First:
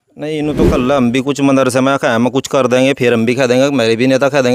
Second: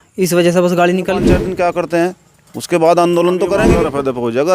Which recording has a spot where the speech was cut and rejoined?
second; 2 cuts; at 1.5 s, 3.8 s

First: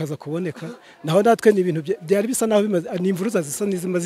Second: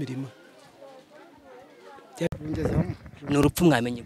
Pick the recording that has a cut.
second; 1 cut; at 2.4 s

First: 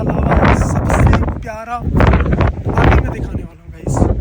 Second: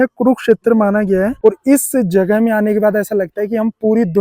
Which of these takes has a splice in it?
second; 1 cut; at 1.4 s

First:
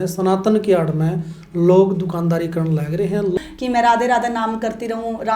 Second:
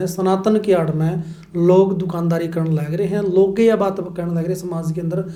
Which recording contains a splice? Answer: first; 1 cut; at 3.4 s

